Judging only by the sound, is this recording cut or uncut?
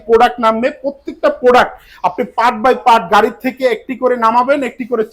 uncut